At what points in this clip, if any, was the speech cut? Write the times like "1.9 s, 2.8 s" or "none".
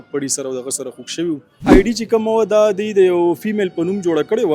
1.7 s